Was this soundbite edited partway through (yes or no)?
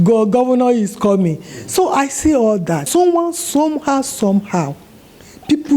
yes